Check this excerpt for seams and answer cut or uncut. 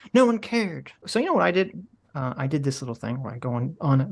cut